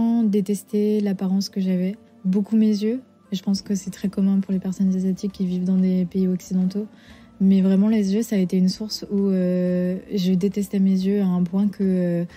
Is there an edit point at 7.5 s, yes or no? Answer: no